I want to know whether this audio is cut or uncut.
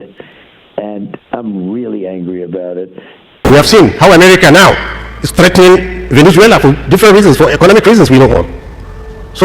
cut